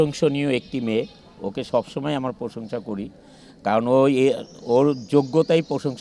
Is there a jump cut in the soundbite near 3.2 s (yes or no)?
no